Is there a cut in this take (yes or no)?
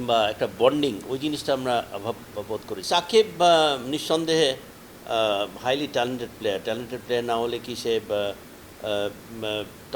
yes